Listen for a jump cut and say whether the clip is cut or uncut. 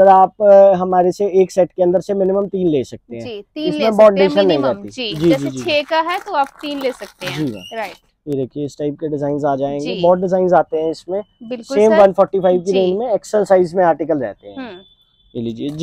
uncut